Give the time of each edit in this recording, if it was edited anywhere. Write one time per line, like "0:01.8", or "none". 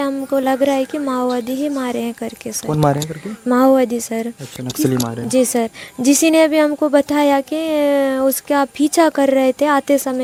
none